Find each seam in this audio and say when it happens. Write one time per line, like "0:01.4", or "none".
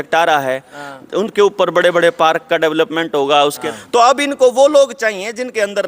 0:03.7

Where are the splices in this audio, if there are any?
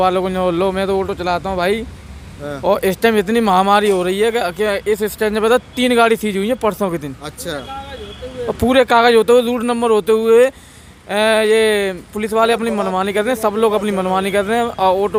none

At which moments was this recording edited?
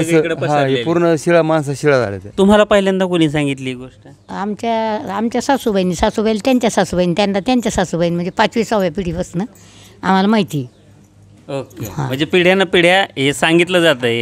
0:02.2

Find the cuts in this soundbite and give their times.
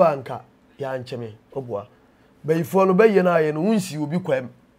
none

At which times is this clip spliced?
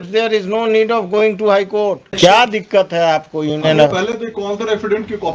0:02.2

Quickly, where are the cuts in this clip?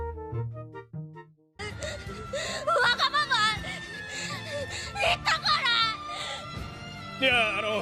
0:01.6

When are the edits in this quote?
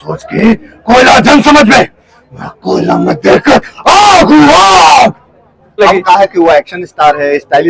0:05.8

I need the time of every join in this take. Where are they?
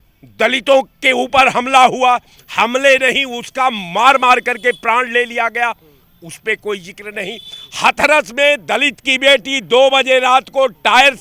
none

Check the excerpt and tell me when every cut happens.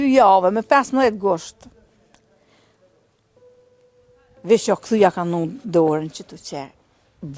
0:02.8
0:04.4

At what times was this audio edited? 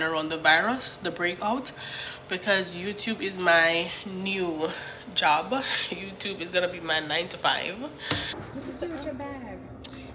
0:02.0
0:08.4

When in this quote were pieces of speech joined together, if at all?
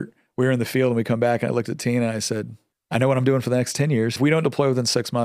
0:04.2

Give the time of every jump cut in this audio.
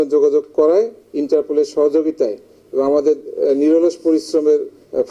none

